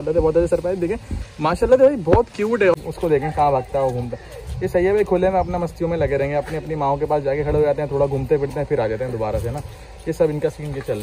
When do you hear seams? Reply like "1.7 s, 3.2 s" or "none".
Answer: 2.7 s

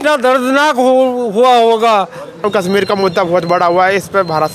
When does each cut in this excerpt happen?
2.4 s

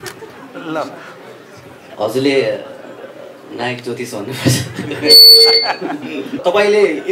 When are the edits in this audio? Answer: 1.8 s, 6.4 s

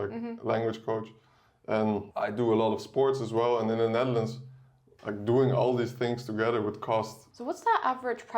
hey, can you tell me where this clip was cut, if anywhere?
2.1 s, 7.2 s

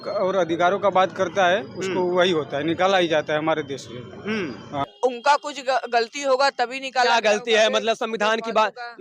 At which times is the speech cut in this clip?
4.8 s

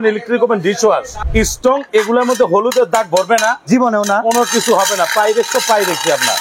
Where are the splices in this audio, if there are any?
1.2 s

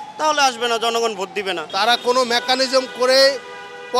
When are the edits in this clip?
1.6 s

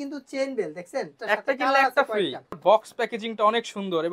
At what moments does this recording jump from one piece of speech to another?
1.2 s, 2.6 s

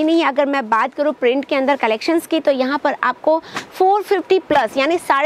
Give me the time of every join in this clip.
none

